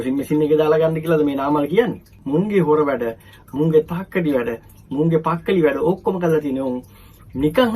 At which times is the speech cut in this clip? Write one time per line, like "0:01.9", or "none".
0:02.1